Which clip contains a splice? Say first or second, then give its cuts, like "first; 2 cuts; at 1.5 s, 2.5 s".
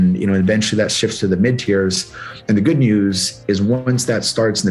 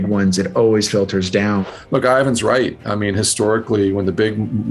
second; 1 cut; at 1.7 s